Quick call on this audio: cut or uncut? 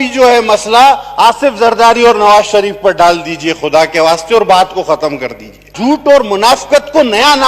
cut